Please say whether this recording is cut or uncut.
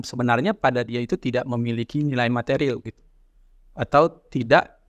uncut